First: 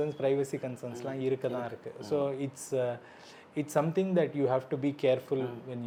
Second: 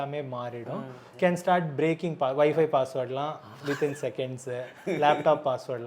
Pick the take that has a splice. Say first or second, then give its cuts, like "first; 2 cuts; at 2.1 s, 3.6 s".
second; 1 cut; at 1.0 s